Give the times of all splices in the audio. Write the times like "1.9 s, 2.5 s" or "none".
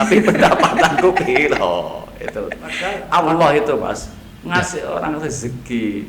2.9 s